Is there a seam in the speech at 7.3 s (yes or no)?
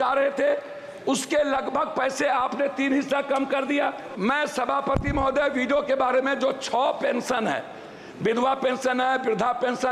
no